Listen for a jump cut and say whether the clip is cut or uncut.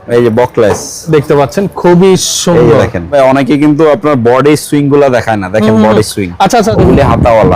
cut